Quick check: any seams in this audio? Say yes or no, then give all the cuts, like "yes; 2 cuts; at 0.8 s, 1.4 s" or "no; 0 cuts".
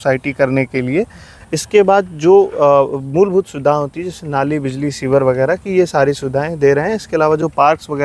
no; 0 cuts